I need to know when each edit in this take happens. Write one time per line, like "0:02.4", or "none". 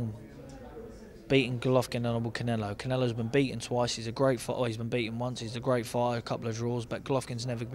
none